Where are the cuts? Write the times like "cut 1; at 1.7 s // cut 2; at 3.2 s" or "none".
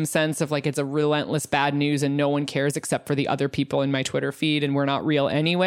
none